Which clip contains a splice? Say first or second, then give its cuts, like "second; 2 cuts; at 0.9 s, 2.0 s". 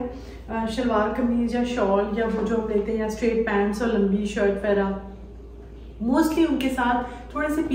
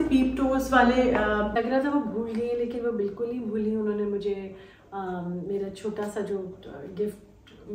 second; 1 cut; at 1.5 s